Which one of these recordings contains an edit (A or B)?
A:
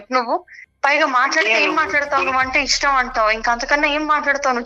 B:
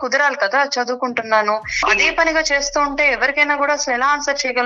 B